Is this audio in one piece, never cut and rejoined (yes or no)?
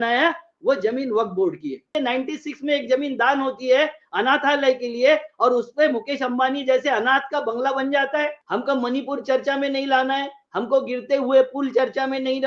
no